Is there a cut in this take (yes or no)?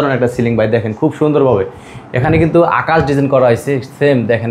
no